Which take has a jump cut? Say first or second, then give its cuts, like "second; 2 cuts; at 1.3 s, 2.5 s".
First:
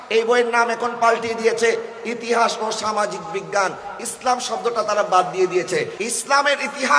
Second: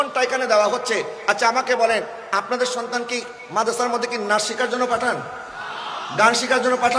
first; 1 cut; at 5.9 s